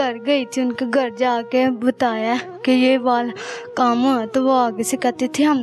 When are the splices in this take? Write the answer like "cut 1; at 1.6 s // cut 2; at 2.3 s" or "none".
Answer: none